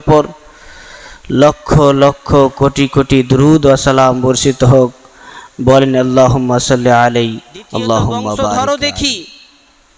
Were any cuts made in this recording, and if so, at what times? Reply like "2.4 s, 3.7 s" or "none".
8.5 s